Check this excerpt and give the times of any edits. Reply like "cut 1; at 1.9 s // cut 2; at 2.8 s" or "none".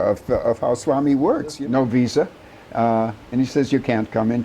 cut 1; at 1.6 s

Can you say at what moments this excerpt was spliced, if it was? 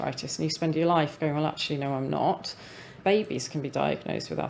cut 1; at 2.9 s

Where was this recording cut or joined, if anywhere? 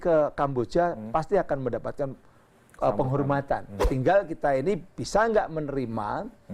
cut 1; at 3.9 s

